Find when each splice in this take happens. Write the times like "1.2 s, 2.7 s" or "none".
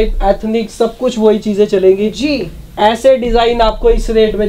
none